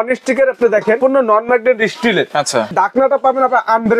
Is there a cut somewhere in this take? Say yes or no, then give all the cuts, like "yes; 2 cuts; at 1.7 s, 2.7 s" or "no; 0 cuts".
yes; 2 cuts; at 1.0 s, 2.7 s